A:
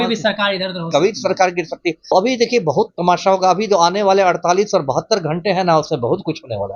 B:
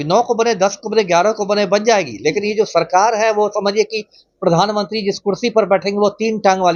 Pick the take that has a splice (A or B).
A